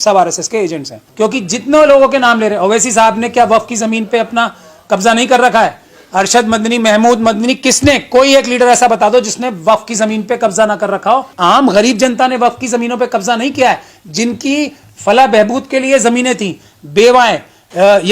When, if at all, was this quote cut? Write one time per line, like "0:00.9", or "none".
0:01.0
0:11.3